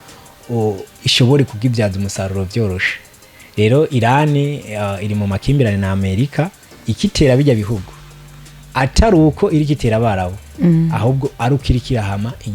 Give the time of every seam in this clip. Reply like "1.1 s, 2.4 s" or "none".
none